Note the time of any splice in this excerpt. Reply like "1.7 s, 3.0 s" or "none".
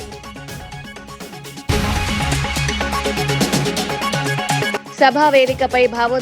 1.7 s, 4.6 s